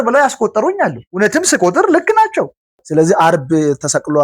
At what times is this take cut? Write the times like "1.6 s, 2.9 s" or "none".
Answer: 2.8 s